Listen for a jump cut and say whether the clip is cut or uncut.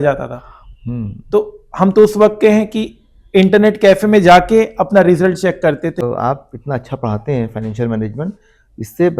cut